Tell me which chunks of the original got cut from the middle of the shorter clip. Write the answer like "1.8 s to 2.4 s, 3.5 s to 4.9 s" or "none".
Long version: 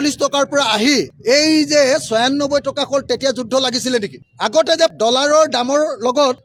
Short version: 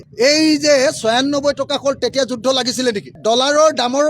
4.3 s to 4.9 s